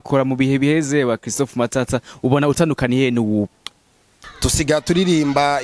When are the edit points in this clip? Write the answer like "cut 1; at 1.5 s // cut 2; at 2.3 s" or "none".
cut 1; at 4.2 s

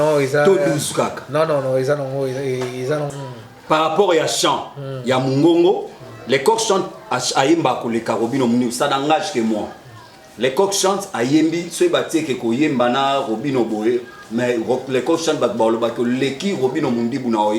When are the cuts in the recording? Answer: cut 1; at 3.1 s

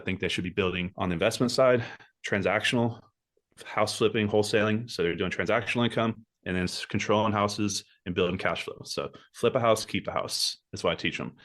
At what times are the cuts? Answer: cut 1; at 0.9 s

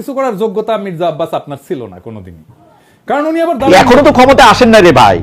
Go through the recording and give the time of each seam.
cut 1; at 3.7 s

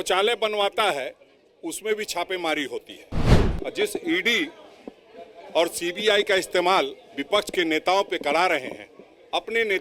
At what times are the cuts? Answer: cut 1; at 3.4 s

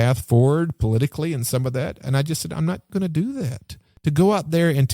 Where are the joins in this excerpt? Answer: cut 1; at 2.9 s // cut 2; at 3.9 s

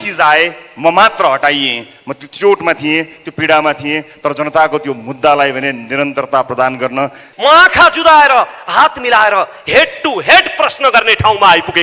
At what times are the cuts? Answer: cut 1; at 7.2 s

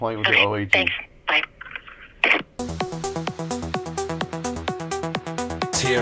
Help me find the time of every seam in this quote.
cut 1; at 2.8 s

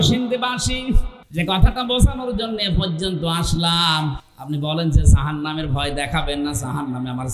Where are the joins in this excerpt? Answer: cut 1; at 1.2 s

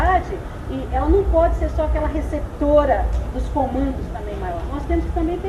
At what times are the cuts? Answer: none

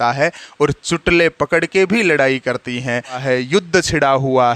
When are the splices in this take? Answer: cut 1; at 3.2 s

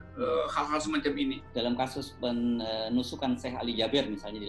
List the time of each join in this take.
cut 1; at 1.4 s

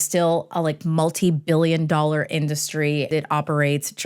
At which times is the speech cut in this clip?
cut 1; at 3.1 s

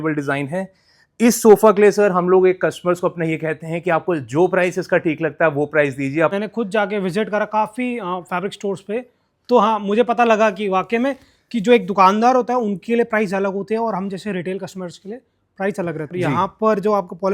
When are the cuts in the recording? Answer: cut 1; at 6.3 s // cut 2; at 16.1 s

